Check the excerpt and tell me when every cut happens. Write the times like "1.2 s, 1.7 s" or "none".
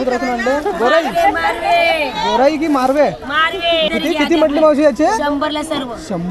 3.9 s

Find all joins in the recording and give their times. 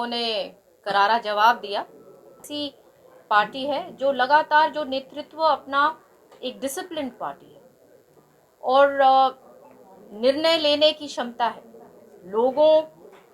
2.5 s

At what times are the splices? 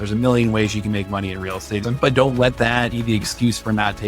1.9 s, 2.9 s

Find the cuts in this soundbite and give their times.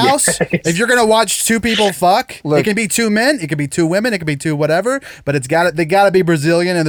none

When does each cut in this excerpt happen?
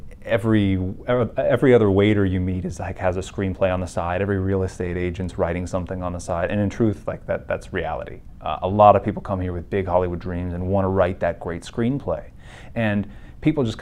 none

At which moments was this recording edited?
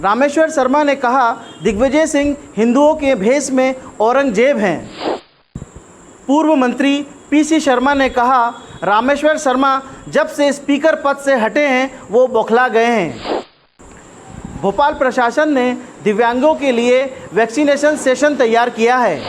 5.1 s, 13.6 s

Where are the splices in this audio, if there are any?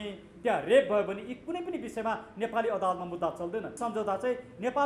3.7 s

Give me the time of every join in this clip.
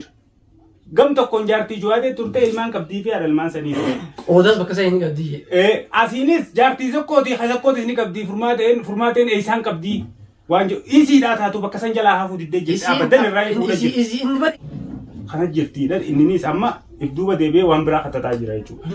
14.5 s

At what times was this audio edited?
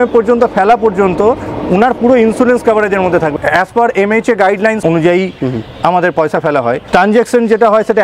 3.3 s, 4.8 s, 6.8 s

